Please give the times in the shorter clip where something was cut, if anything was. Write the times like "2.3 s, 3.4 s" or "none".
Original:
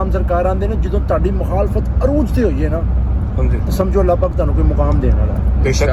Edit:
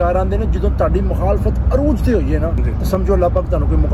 2.6 s